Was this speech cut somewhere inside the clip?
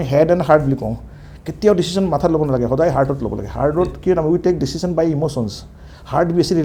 no; 0 cuts

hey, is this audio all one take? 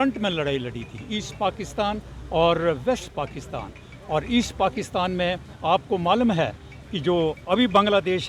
yes; 0 cuts

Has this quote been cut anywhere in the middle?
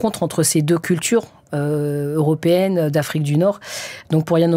no; 0 cuts

